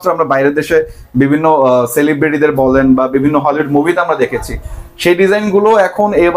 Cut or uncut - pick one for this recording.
uncut